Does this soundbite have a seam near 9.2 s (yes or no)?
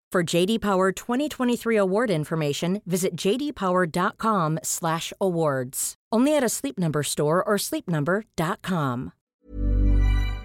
yes